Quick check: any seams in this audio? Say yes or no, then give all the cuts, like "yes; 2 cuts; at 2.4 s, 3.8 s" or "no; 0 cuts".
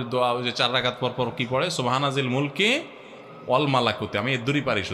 no; 0 cuts